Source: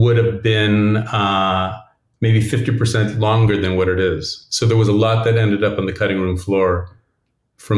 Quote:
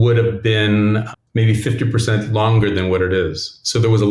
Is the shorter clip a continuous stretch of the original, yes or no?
no